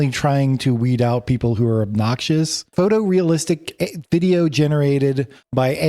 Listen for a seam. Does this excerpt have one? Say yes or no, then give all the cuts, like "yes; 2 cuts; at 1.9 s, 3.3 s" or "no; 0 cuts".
yes; 1 cut; at 2.6 s